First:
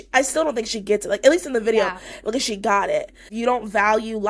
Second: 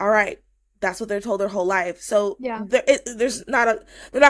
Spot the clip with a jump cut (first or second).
first